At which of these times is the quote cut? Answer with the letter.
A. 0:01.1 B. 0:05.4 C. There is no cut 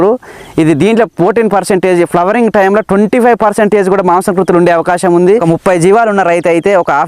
B